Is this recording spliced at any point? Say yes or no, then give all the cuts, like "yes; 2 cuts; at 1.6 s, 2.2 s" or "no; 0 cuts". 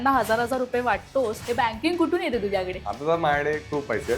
yes; 2 cuts; at 1.4 s, 2.8 s